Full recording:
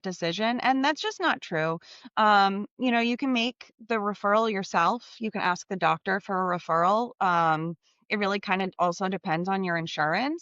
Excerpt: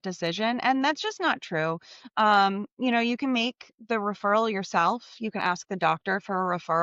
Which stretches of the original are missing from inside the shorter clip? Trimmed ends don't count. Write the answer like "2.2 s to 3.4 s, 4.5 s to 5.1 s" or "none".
none